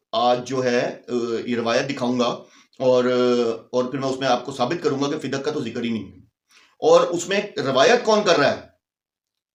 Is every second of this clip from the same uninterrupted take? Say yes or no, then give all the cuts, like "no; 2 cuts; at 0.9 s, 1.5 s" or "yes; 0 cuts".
yes; 0 cuts